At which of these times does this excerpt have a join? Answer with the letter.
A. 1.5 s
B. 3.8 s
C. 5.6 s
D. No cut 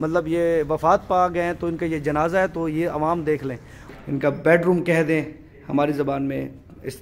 B